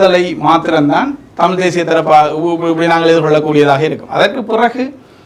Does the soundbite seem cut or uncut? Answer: uncut